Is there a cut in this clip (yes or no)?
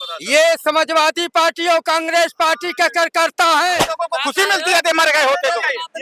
yes